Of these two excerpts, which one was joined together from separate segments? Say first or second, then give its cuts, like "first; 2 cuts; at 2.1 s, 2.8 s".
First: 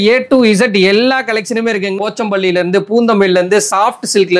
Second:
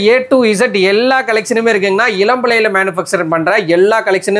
first; 1 cut; at 2.0 s